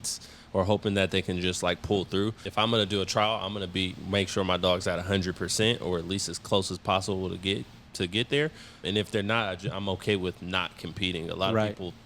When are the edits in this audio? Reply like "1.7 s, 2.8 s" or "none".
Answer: 2.4 s